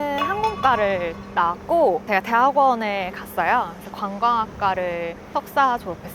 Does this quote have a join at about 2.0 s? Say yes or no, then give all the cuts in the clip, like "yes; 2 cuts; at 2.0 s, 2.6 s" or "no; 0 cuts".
yes; 2 cuts; at 2.0 s, 5.2 s